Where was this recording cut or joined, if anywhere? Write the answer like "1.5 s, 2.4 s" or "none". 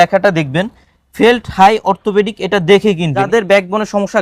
3.3 s